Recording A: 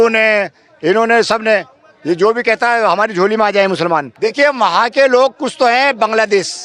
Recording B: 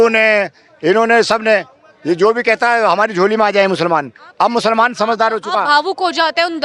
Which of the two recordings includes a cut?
A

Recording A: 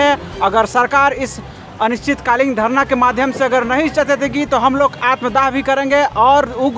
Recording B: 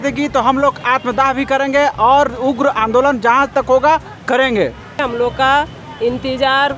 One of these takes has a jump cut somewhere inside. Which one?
B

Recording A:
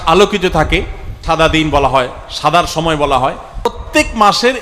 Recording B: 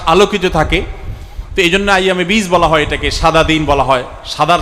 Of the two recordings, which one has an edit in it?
A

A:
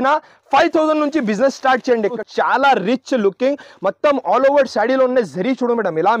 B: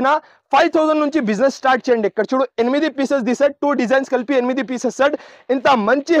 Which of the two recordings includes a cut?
A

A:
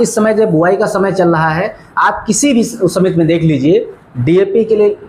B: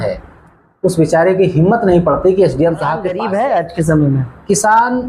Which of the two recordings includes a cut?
B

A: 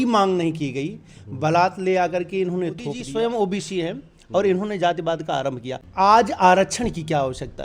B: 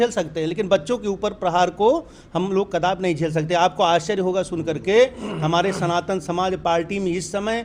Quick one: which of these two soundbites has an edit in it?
A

